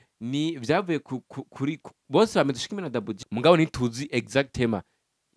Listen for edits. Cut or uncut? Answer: cut